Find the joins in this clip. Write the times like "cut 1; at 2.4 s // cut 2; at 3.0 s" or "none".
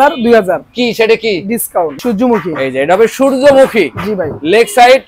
cut 1; at 2.0 s